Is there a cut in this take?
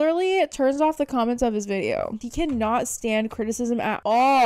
yes; 1 cut; at 2.2 s

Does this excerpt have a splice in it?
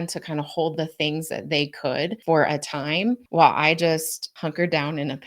yes; 3 cuts; at 2.2 s, 3.2 s, 4.2 s

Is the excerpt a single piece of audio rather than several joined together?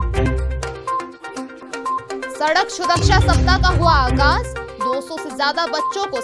no; 1 cut; at 1.2 s

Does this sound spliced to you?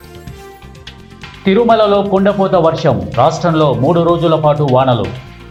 no; 0 cuts

